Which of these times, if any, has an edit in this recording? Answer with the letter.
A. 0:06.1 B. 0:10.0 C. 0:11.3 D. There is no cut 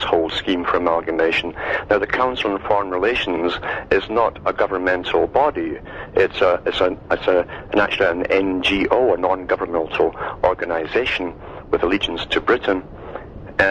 D